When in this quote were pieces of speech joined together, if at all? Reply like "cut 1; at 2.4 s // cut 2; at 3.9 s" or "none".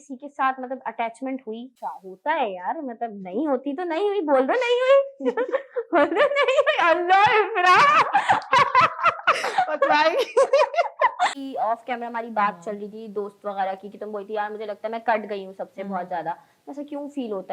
cut 1; at 1.7 s // cut 2; at 11.3 s

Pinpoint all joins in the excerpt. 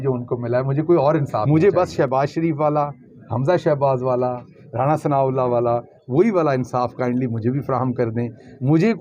cut 1; at 1.4 s

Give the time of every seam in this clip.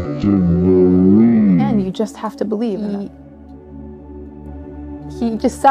cut 1; at 1.7 s // cut 2; at 2.8 s

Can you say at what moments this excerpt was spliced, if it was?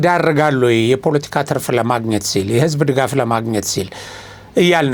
none

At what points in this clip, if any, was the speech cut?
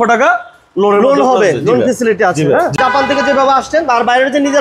cut 1; at 2.8 s

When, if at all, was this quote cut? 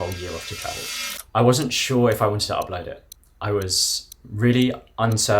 cut 1; at 1.1 s

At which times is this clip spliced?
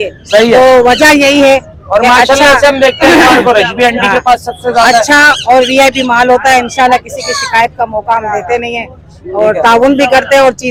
none

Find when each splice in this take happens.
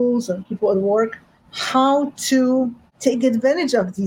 cut 1; at 2.8 s

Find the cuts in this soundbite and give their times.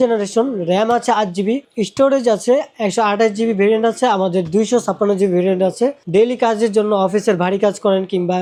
none

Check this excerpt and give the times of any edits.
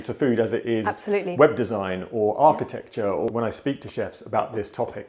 cut 1; at 3.3 s

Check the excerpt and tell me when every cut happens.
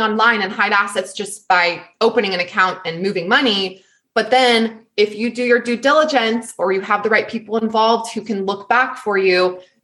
none

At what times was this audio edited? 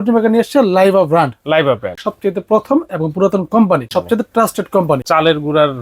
cut 1; at 2.1 s // cut 2; at 3.9 s // cut 3; at 5.0 s

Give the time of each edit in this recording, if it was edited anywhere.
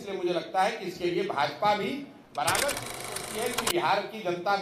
cut 1; at 3.1 s

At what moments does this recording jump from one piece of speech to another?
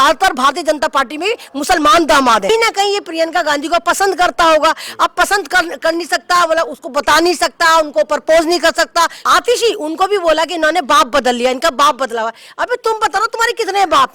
cut 1; at 2.5 s // cut 2; at 9.2 s

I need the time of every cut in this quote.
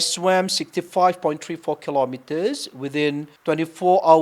cut 1; at 3.3 s

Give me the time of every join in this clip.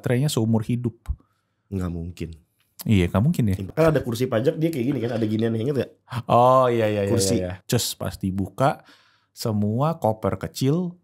cut 1; at 3.7 s // cut 2; at 7.5 s

